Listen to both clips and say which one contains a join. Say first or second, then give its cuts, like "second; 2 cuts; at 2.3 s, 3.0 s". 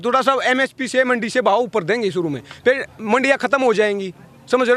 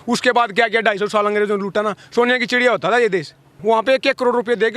second; 1 cut; at 3.5 s